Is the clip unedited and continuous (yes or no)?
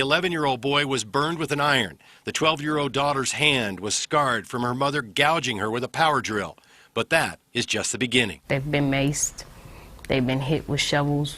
yes